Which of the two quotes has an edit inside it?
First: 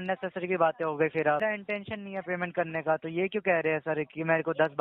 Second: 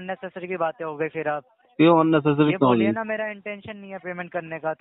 first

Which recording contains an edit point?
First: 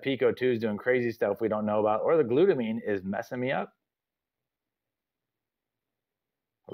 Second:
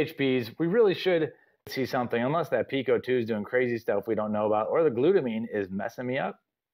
second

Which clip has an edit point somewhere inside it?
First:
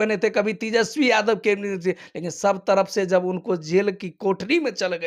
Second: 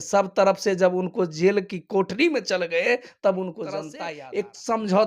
second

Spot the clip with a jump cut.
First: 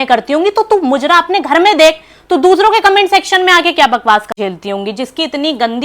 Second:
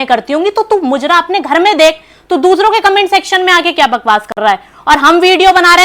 first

